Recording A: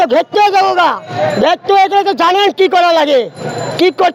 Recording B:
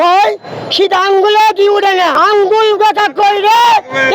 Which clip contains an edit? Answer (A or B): B